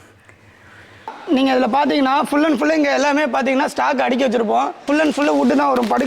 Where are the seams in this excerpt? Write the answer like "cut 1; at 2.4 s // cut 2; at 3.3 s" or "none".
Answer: cut 1; at 1.1 s // cut 2; at 4.8 s